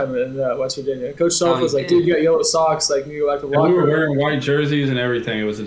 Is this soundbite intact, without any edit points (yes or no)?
yes